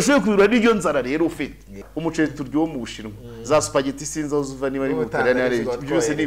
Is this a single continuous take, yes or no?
no